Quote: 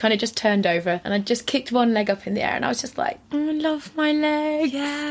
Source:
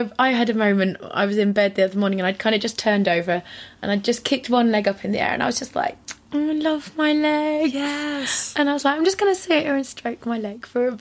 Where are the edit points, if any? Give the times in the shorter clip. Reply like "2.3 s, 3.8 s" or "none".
1.0 s, 3.2 s